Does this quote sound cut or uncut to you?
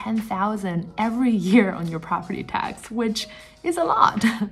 uncut